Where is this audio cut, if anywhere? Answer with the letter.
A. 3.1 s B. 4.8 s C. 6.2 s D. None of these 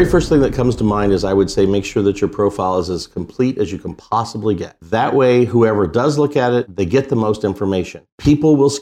B